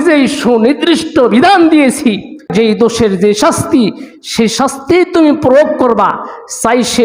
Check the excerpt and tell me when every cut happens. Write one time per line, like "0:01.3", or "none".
0:02.5

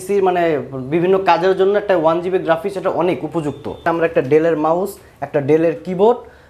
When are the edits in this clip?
0:03.8

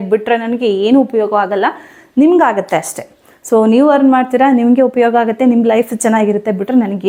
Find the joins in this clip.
none

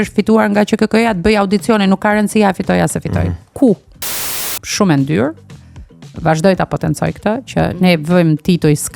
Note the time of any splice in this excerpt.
0:04.3

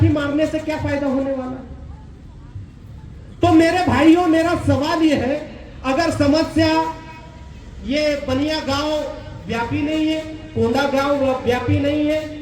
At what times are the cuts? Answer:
none

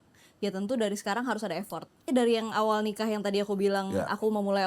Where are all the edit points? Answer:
0:02.1

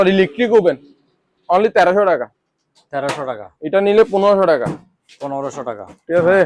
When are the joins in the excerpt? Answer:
none

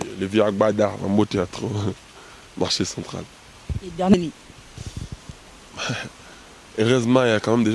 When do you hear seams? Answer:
0:04.1

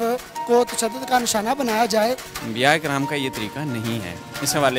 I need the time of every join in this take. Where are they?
0:02.3

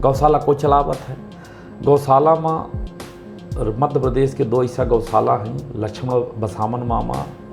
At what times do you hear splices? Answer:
none

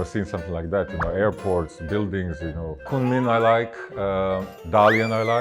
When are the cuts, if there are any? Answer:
0:02.9

